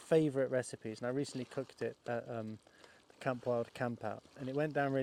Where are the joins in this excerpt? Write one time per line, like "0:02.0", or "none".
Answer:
none